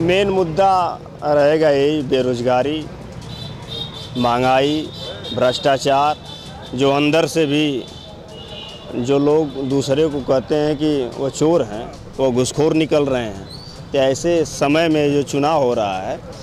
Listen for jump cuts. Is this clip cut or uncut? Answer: uncut